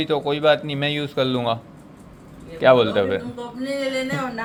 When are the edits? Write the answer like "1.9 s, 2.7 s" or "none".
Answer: none